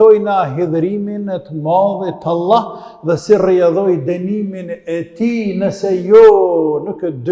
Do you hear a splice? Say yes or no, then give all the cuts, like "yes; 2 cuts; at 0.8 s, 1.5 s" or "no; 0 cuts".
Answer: no; 0 cuts